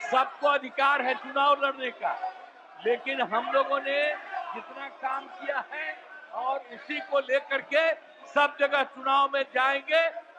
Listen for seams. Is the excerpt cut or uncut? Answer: uncut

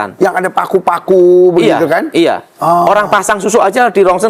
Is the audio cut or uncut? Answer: uncut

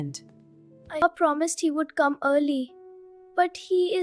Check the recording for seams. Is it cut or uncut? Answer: cut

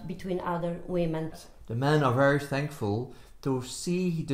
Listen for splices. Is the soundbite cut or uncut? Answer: cut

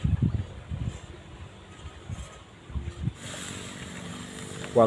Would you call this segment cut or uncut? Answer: cut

